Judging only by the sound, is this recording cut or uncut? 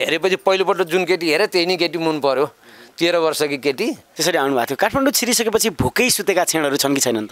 cut